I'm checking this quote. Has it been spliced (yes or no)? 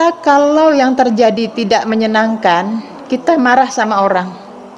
no